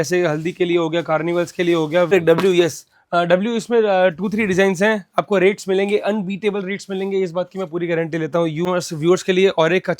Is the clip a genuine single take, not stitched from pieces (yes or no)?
no